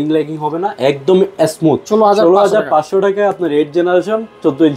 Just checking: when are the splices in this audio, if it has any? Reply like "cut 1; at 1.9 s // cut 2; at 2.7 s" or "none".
cut 1; at 1.8 s